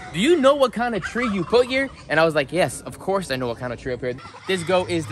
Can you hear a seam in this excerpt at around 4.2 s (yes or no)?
yes